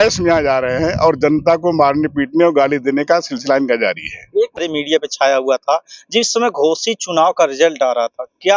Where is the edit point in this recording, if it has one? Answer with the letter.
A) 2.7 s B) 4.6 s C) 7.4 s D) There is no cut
B